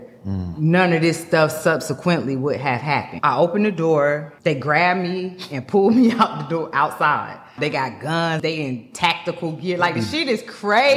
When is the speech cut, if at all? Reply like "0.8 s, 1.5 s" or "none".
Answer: 3.1 s, 4.3 s, 7.5 s, 8.4 s